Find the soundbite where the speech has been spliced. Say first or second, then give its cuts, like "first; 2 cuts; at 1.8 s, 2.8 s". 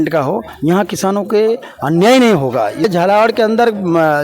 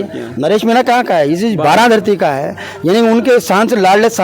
first; 1 cut; at 2.8 s